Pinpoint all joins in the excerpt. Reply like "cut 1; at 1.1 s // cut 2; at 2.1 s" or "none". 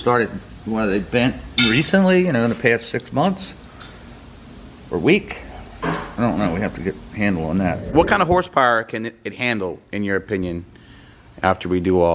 cut 1; at 7.9 s